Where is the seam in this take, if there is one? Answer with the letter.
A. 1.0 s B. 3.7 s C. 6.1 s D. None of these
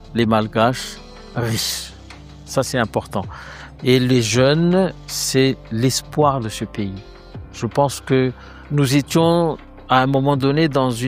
D